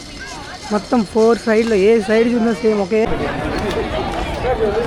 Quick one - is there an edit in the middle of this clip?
yes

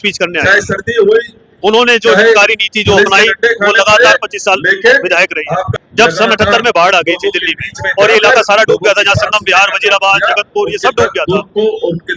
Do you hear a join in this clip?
yes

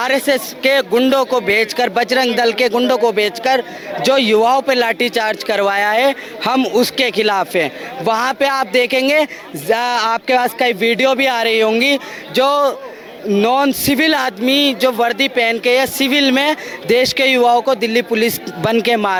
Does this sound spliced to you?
no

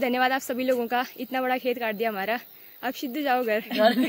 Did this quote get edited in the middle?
no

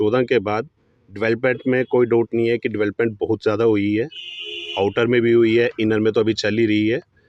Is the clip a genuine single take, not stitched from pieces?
yes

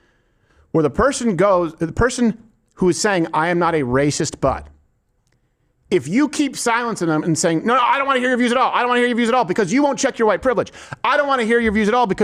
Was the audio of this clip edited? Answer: no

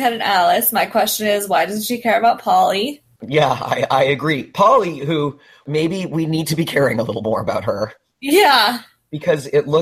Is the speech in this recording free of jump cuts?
no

